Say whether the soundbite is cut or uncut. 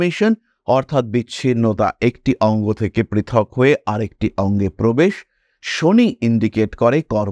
uncut